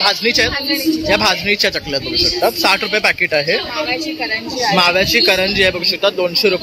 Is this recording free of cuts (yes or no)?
yes